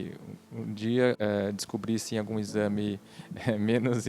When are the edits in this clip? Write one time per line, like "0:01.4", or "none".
0:01.2